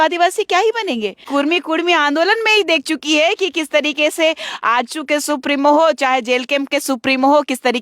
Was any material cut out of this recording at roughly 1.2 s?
yes; 1 cut; at 1.2 s

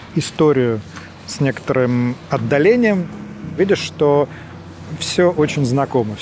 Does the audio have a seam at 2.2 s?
no; 1 cut; at 3.6 s

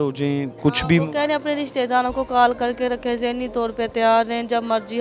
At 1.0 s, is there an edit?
no; 0 cuts

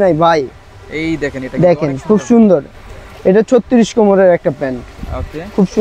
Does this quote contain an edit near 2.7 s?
no; 0 cuts

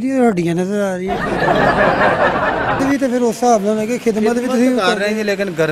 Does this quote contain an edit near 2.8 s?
yes; 2 cuts; at 1.1 s, 2.8 s

